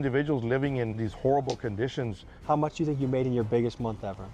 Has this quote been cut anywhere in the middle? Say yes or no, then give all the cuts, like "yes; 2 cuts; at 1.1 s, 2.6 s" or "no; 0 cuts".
yes; 2 cuts; at 1.1 s, 2.3 s